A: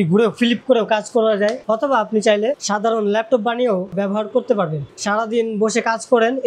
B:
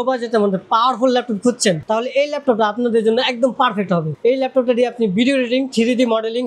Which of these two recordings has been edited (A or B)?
A